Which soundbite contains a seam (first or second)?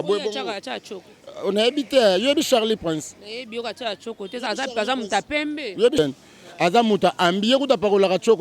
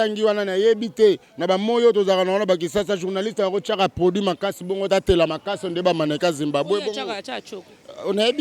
first